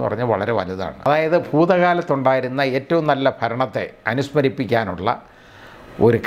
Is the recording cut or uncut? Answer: cut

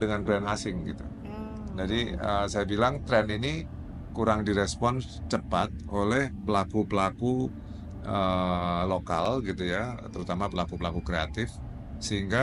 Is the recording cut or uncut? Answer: uncut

